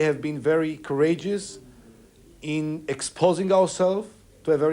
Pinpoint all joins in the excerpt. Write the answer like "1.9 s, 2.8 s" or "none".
none